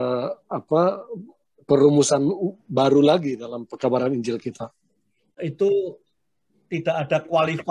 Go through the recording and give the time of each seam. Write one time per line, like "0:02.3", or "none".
0:05.4